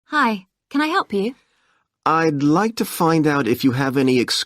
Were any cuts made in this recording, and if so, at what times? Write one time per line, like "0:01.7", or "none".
0:02.3